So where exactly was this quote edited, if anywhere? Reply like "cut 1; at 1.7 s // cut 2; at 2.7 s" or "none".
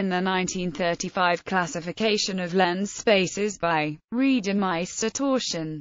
none